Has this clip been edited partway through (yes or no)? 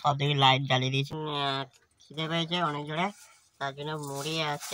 yes